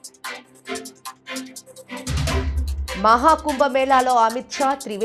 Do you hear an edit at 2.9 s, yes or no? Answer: no